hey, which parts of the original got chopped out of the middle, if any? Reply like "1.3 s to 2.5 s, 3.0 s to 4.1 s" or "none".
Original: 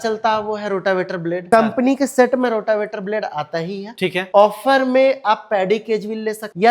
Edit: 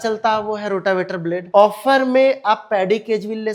1.4 s to 4.2 s